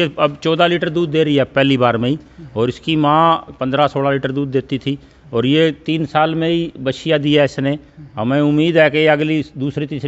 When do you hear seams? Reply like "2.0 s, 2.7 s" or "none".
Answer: none